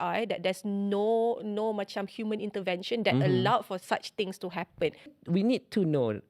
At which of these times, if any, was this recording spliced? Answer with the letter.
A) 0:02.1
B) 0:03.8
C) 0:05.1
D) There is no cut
C